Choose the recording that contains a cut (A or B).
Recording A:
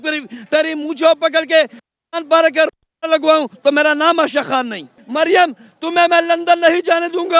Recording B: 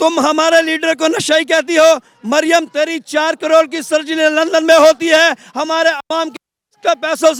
A